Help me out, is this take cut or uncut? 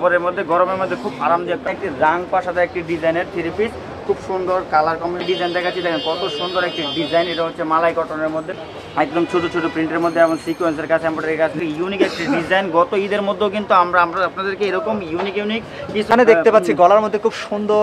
cut